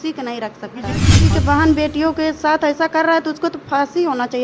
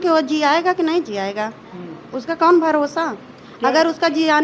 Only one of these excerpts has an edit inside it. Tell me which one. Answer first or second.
first